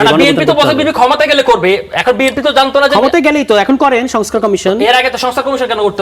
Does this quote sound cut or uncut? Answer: uncut